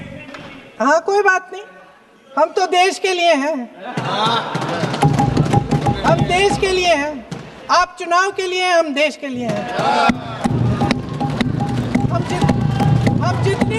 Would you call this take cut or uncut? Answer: uncut